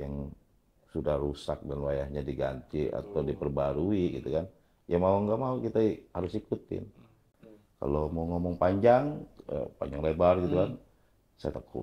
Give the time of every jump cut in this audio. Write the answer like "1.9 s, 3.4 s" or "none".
7.2 s